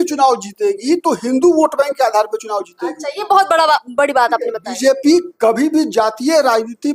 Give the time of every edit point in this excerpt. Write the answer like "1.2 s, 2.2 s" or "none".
none